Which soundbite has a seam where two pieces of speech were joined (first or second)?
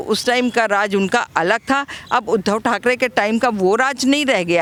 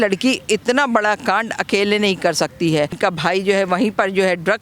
second